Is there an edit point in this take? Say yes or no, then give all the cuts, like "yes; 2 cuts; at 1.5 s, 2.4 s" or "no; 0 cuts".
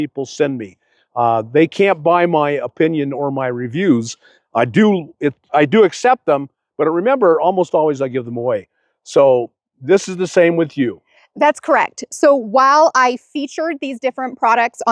no; 0 cuts